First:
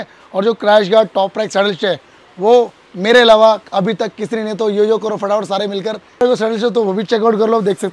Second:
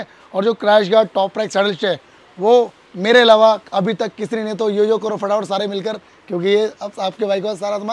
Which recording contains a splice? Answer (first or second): first